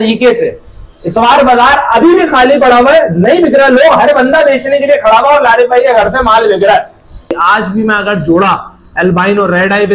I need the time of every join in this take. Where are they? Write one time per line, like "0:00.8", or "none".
0:07.4